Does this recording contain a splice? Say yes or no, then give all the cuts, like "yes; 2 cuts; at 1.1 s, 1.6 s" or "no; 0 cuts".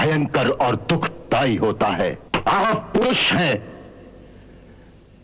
yes; 1 cut; at 2.2 s